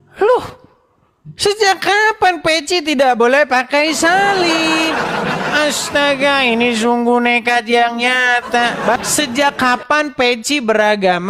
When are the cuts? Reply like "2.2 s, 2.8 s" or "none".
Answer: 9.0 s